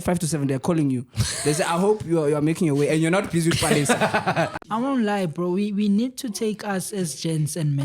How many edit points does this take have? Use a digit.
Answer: 1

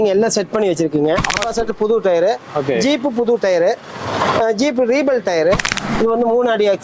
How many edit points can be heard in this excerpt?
2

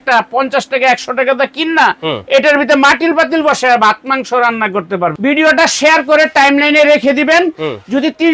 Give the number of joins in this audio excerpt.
1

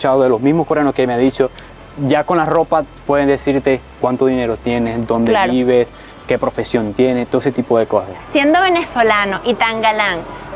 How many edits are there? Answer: 1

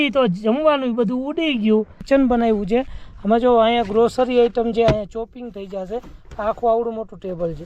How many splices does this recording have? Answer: 1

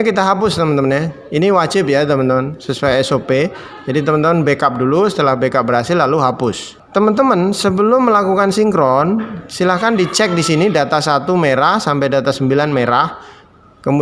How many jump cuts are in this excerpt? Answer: 1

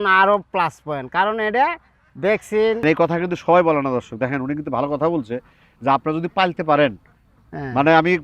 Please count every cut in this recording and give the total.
1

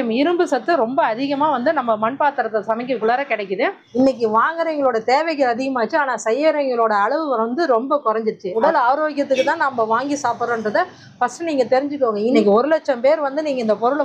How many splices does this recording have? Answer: 3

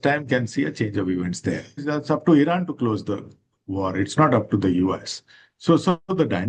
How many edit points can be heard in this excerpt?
1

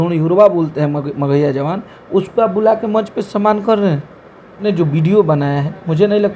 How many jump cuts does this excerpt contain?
1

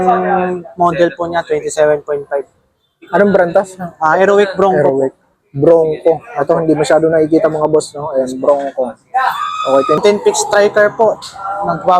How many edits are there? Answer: 1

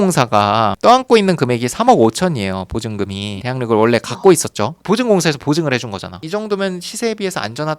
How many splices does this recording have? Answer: 1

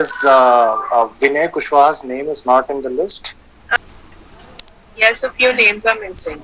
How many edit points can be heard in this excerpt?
1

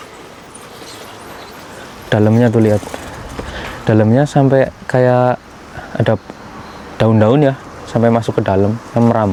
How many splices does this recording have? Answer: 0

